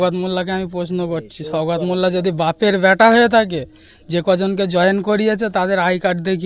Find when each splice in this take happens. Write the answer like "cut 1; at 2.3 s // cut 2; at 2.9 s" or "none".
none